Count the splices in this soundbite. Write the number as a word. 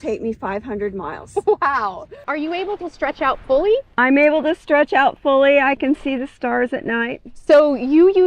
one